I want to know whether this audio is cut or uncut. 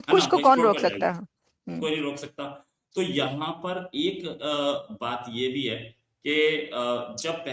uncut